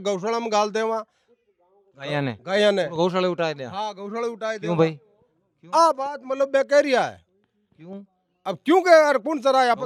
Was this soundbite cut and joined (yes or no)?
no